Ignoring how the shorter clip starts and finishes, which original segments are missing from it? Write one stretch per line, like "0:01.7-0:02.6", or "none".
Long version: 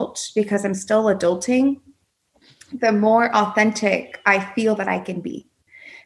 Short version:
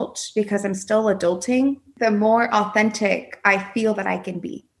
0:01.9-0:02.7